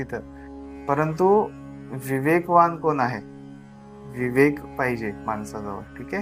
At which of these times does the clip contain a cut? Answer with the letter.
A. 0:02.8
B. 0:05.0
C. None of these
C